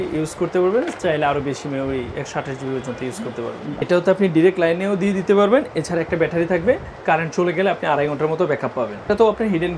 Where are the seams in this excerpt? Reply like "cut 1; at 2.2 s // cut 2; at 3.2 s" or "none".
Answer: cut 1; at 3.8 s // cut 2; at 9.1 s